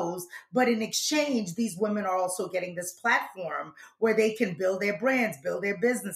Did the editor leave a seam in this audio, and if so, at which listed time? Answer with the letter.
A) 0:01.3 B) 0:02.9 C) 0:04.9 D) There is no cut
D